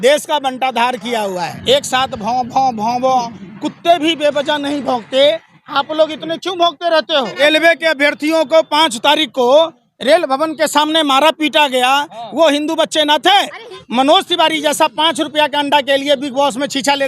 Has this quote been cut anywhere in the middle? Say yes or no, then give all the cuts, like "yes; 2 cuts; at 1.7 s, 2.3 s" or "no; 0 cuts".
yes; 3 cuts; at 1.5 s, 7.4 s, 13.8 s